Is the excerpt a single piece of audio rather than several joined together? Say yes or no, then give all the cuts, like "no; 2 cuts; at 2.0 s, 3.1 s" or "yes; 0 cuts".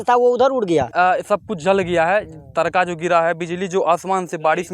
no; 1 cut; at 0.9 s